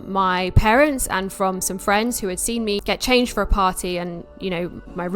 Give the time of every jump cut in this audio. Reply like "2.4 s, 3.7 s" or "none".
2.8 s